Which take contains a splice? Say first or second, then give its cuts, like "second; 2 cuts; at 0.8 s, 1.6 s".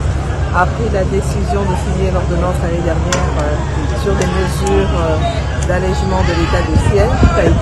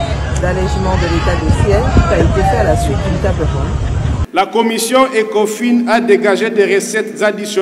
second; 1 cut; at 4.2 s